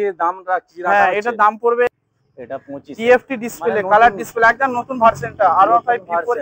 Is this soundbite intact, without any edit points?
no; 1 cut; at 1.9 s

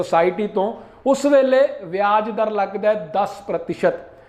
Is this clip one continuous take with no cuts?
yes; 0 cuts

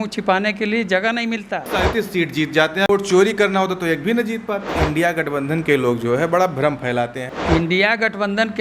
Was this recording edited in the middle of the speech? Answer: yes; 4 cuts; at 1.7 s, 2.9 s, 4.8 s, 7.2 s

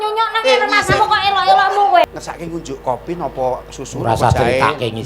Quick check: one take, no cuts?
no; 1 cut; at 2.1 s

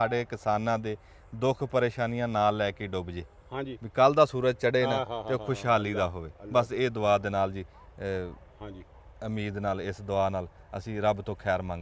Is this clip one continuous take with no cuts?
yes; 0 cuts

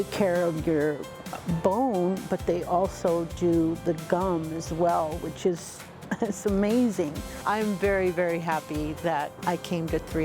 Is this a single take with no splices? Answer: no; 2 cuts; at 7.4 s, 9.3 s

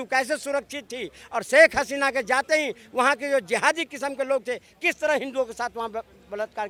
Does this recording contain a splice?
no; 0 cuts

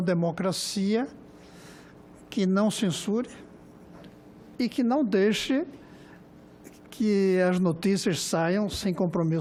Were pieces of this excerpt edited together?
no; 0 cuts

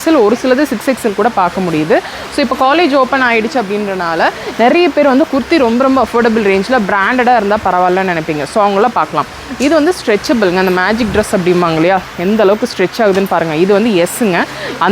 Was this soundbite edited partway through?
no; 0 cuts

